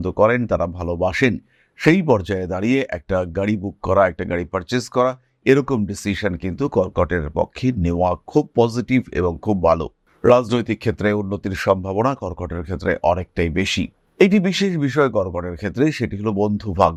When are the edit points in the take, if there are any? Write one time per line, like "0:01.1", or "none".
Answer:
none